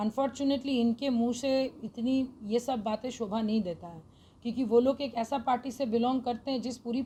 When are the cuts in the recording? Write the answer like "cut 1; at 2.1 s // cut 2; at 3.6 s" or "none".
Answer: none